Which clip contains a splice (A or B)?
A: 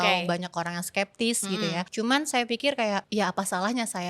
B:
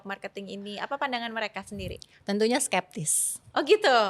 A